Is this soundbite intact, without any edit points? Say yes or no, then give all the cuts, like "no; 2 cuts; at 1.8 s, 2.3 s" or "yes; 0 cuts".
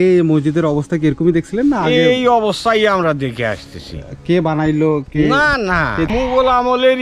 no; 1 cut; at 6.1 s